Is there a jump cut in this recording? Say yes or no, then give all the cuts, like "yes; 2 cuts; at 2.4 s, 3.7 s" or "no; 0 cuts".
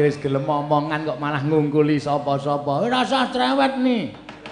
no; 0 cuts